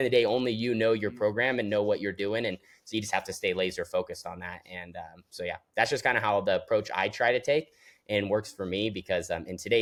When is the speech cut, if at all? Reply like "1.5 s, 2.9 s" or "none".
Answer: none